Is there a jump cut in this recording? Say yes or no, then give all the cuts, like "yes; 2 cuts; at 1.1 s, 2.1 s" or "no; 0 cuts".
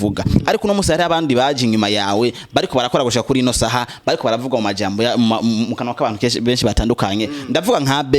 no; 0 cuts